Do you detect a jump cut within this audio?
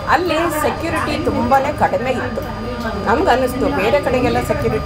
no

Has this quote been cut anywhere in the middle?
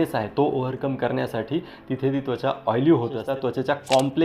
yes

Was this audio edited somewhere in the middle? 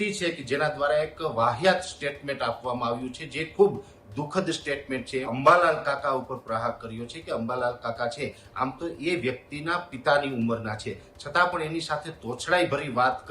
yes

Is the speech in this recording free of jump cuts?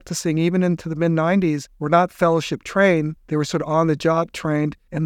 no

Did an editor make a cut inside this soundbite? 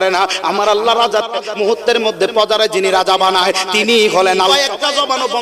yes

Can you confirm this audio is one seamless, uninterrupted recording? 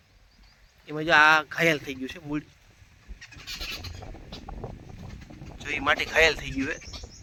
yes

